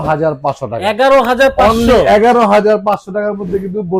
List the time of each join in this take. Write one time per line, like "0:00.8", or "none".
none